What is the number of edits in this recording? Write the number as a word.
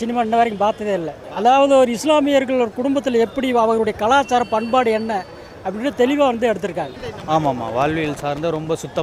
two